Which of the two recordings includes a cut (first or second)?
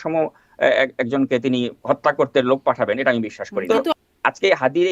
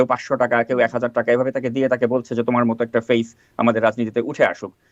first